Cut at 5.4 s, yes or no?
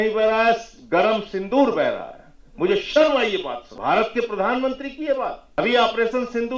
yes